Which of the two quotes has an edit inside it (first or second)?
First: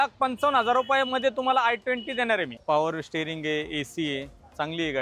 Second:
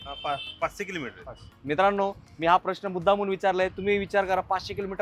first